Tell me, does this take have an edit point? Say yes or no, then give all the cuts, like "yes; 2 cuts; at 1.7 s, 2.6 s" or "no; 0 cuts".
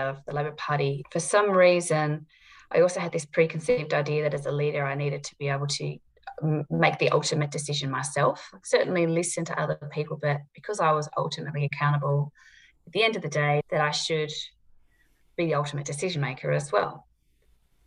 no; 0 cuts